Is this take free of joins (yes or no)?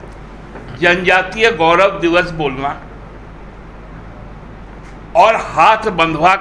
yes